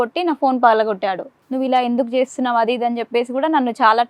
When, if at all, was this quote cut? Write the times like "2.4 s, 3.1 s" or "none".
1.3 s